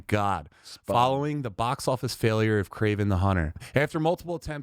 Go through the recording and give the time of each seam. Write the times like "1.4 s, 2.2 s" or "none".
3.6 s